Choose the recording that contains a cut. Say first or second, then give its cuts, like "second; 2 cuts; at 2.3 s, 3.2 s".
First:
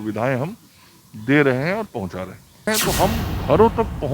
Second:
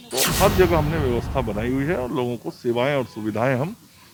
first; 1 cut; at 2.7 s